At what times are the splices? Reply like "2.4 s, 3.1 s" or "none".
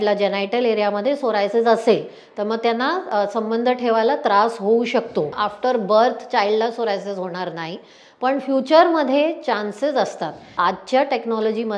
5.3 s, 10.6 s